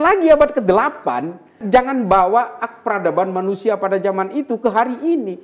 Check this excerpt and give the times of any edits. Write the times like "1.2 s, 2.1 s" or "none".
1.5 s